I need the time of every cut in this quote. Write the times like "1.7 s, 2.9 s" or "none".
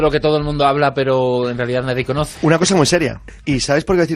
0.9 s